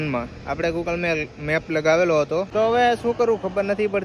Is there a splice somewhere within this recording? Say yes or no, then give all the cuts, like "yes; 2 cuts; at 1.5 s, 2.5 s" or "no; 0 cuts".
yes; 1 cut; at 2.5 s